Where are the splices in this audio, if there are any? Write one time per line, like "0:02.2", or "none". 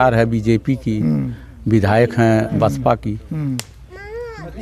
none